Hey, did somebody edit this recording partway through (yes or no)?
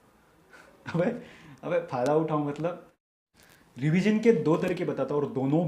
yes